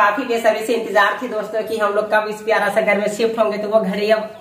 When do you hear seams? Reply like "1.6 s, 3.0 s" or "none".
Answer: none